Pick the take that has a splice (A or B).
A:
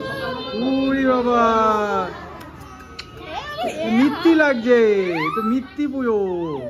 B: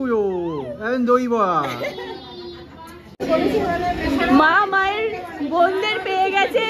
B